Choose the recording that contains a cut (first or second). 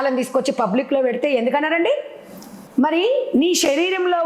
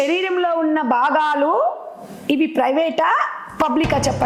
first